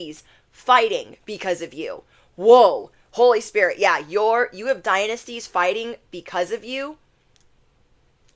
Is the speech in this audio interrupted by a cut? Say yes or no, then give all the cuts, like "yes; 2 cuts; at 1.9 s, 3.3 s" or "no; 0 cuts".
no; 0 cuts